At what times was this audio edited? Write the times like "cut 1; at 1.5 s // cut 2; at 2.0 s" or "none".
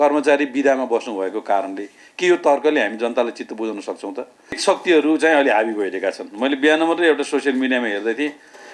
cut 1; at 4.6 s